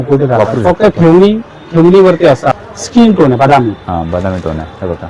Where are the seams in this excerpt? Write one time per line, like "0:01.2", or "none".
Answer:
0:02.5